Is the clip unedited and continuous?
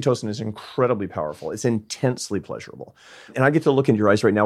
no; 1 cut; at 3.3 s

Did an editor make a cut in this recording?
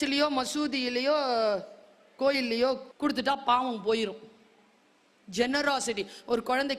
yes; 1 cut; at 2.9 s

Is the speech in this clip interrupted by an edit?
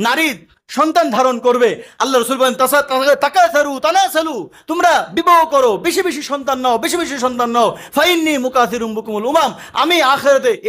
no; 0 cuts

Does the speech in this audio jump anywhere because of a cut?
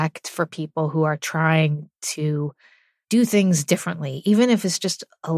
no; 0 cuts

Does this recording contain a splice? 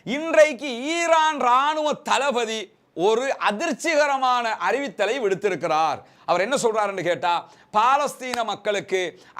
yes; 1 cut; at 6.2 s

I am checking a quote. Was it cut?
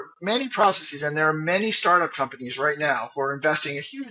no; 0 cuts

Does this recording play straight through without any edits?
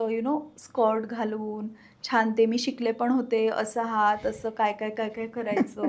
yes; 0 cuts

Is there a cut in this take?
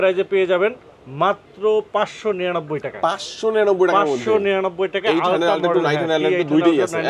no; 0 cuts

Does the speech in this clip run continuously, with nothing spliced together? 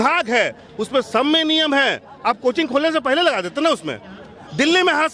yes; 0 cuts

